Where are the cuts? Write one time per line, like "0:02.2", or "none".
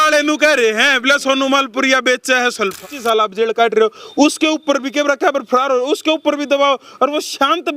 0:02.8

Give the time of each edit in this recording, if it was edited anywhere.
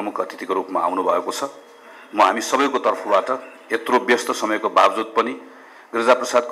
none

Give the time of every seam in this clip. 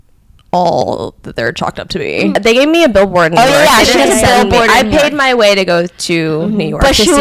0:02.4

